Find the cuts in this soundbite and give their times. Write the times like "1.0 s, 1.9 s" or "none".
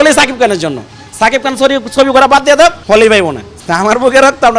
2.8 s, 3.5 s

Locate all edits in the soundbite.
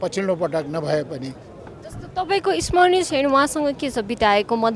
none

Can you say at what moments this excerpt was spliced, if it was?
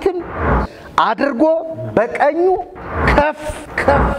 3.2 s

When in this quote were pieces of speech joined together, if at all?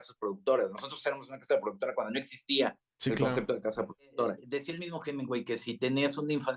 4.4 s

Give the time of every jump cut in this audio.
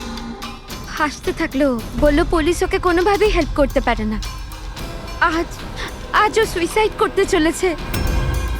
0.9 s

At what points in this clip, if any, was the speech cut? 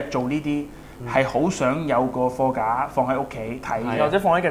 none

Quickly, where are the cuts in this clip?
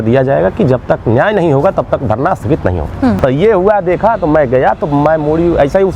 3.2 s

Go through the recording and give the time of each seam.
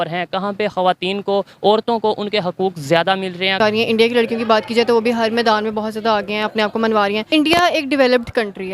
3.6 s, 7.2 s

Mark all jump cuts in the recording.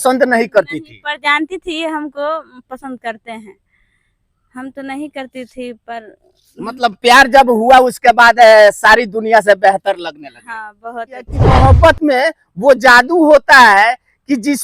11.6 s

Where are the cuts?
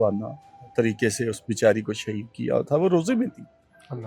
none

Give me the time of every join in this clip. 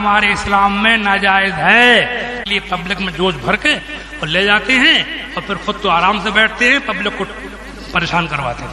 2.4 s

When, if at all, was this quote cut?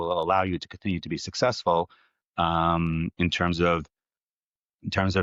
none

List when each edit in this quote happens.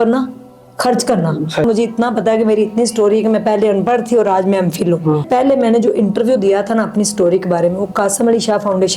1.6 s, 5.2 s

